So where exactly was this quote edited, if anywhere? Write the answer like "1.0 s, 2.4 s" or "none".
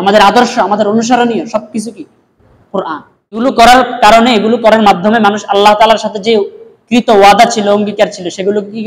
3.4 s